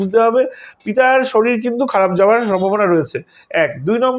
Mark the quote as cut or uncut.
uncut